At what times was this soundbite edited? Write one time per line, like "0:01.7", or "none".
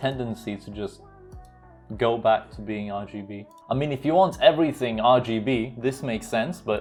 none